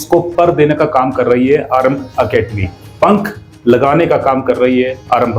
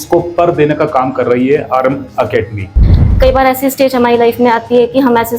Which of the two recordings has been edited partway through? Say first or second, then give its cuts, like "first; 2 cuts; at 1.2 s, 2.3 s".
second; 1 cut; at 2.8 s